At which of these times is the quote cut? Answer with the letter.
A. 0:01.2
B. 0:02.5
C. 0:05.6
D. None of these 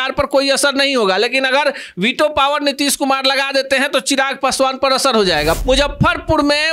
C